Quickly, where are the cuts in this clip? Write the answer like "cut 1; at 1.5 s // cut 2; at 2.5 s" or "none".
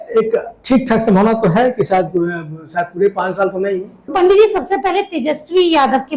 cut 1; at 4.0 s